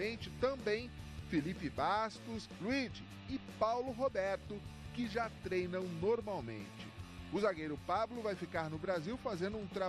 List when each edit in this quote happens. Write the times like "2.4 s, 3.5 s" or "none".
1.3 s